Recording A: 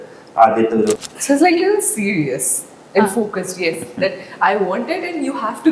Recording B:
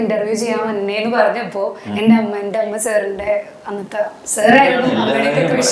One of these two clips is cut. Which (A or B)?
A